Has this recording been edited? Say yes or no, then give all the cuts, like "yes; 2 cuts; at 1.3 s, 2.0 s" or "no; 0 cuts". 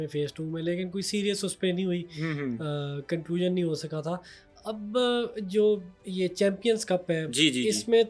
no; 0 cuts